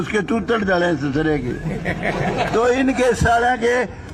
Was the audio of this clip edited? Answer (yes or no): no